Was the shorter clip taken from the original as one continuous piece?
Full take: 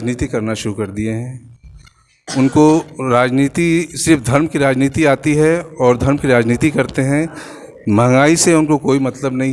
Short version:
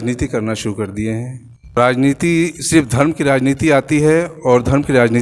no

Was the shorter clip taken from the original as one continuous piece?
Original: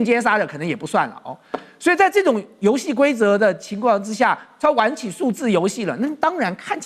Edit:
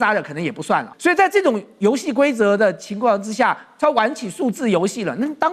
no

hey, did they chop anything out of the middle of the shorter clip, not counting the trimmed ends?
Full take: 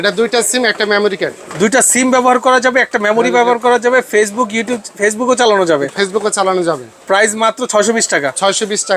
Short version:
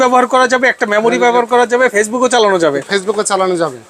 yes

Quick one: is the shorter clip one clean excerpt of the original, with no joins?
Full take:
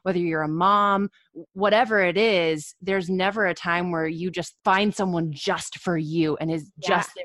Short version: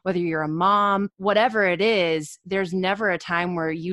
no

